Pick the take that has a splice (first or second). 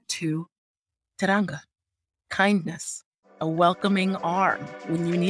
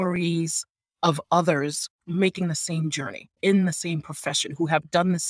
second